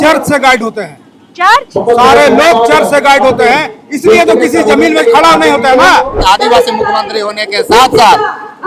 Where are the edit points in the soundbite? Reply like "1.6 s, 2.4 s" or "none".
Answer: 6.2 s